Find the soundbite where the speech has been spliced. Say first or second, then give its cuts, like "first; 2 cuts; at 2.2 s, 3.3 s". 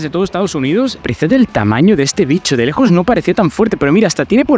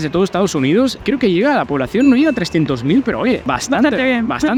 first; 1 cut; at 1.0 s